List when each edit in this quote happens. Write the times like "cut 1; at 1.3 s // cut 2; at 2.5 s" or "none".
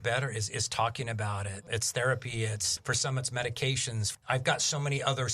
cut 1; at 1.7 s // cut 2; at 4.2 s

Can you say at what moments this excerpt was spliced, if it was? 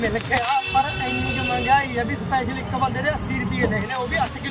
none

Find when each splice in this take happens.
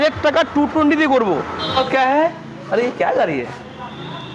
cut 1; at 1.8 s

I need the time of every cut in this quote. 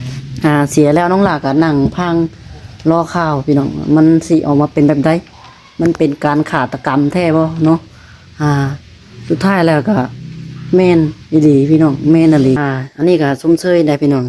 cut 1; at 12.6 s

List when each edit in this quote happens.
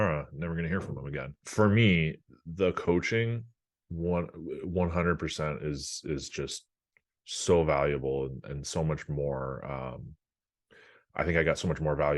cut 1; at 1.4 s

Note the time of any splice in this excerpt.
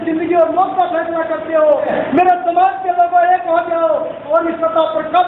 cut 1; at 1.9 s

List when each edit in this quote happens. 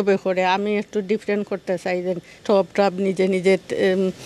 cut 1; at 2.4 s

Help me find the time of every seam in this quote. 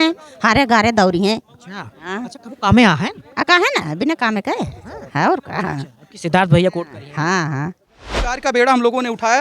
cut 1; at 8.4 s

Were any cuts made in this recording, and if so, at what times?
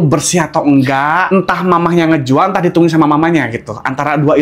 cut 1; at 1.2 s

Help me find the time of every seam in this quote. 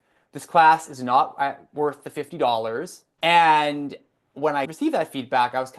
cut 1; at 3.0 s

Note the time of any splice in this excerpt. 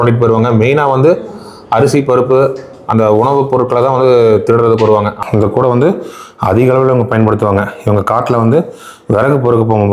cut 1; at 5.2 s

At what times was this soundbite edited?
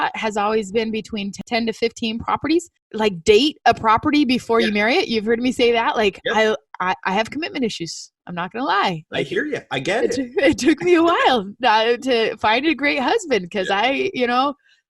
cut 1; at 2.8 s

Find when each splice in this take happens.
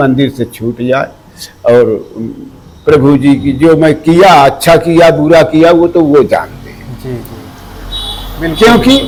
none

